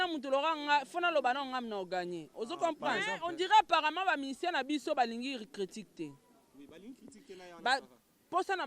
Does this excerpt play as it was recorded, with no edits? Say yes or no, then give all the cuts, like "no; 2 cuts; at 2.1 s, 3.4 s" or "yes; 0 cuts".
no; 1 cut; at 3.0 s